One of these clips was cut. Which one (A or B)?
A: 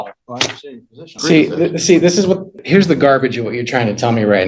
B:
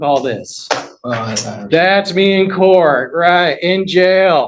A